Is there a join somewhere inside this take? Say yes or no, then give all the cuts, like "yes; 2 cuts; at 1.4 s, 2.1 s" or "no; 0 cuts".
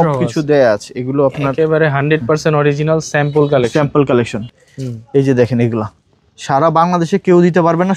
yes; 1 cut; at 4.5 s